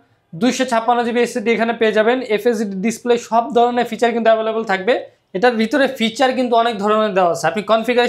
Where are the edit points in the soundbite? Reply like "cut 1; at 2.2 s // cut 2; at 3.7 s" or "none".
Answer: cut 1; at 5.2 s